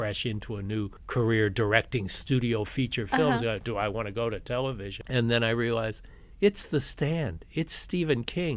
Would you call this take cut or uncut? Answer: cut